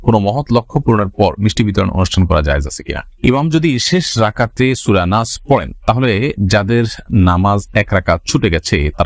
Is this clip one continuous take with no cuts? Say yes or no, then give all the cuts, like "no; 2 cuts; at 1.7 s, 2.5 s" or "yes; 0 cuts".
no; 1 cut; at 3.1 s